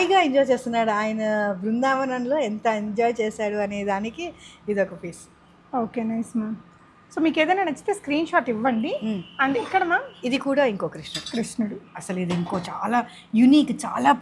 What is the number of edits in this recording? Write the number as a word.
zero